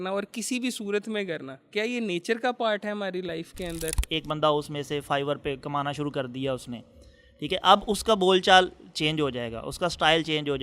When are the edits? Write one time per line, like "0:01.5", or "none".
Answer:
0:04.0